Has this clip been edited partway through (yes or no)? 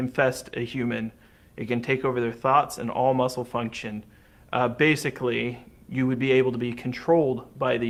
no